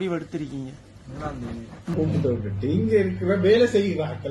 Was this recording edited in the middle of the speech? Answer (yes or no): yes